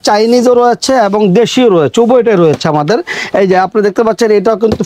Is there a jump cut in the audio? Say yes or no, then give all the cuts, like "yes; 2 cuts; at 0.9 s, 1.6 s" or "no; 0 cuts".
no; 0 cuts